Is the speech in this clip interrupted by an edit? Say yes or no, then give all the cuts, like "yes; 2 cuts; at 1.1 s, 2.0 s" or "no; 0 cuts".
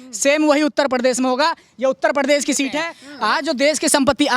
yes; 1 cut; at 3.1 s